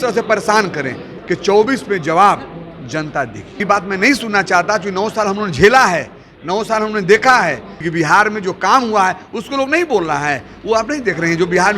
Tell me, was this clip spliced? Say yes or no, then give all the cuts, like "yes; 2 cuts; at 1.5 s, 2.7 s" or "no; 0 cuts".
yes; 3 cuts; at 1.2 s, 3.6 s, 7.7 s